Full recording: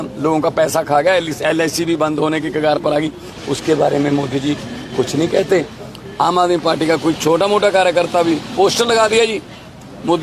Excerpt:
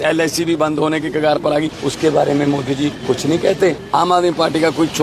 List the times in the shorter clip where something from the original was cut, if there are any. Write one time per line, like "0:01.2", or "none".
0:01.8
0:03.0
0:03.8